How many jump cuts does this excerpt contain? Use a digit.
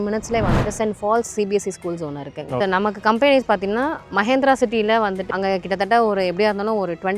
2